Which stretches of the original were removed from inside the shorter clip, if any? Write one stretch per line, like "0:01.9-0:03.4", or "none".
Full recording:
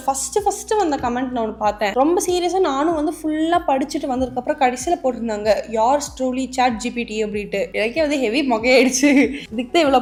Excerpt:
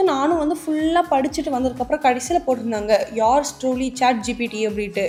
none